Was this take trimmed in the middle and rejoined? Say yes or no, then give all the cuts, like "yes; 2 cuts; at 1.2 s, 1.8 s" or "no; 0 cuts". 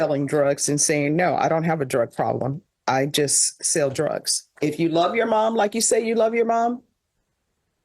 yes; 1 cut; at 4.5 s